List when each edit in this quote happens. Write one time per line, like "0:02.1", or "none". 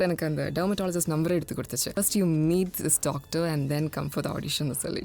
0:01.9